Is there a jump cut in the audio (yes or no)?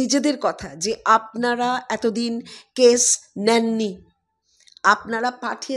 no